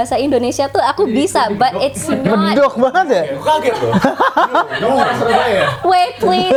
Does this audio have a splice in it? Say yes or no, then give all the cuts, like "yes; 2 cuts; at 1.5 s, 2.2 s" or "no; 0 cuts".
no; 0 cuts